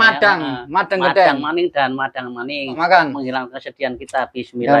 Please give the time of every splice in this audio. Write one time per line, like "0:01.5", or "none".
0:02.8